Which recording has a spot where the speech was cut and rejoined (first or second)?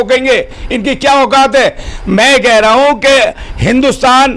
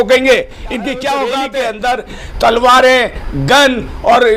second